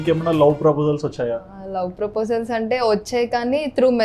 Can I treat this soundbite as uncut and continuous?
no; 1 cut; at 1.5 s

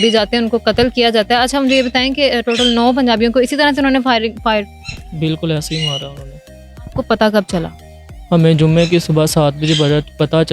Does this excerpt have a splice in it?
no; 0 cuts

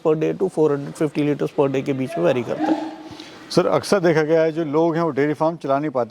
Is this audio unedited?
yes; 0 cuts

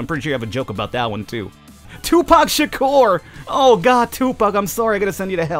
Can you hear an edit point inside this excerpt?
yes; 1 cut; at 1.9 s

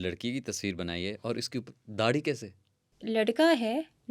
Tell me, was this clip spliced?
yes; 1 cut; at 3.0 s

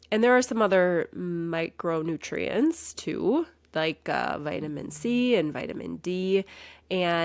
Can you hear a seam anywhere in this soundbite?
no; 0 cuts

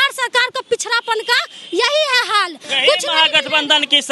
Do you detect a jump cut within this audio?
yes; 1 cut; at 2.6 s

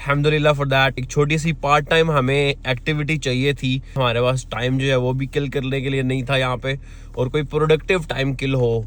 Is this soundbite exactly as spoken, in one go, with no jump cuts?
yes; 0 cuts

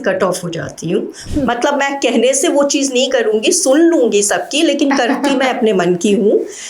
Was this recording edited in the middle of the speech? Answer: yes; 1 cut; at 1.2 s

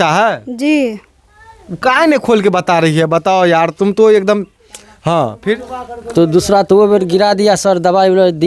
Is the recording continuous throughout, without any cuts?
yes; 0 cuts

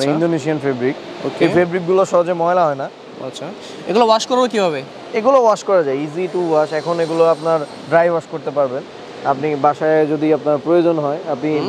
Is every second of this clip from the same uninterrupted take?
yes; 0 cuts

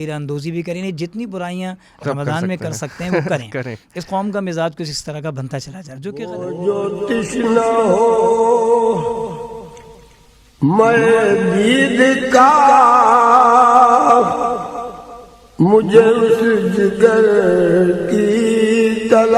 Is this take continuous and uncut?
no; 1 cut; at 6.1 s

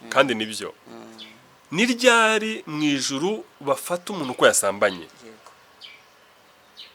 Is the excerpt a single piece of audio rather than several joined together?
yes; 0 cuts

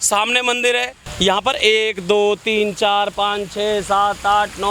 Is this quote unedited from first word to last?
no; 1 cut; at 1.0 s

